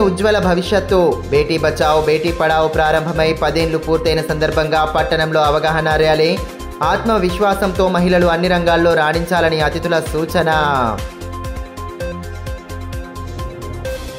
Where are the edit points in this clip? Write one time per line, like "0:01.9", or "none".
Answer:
none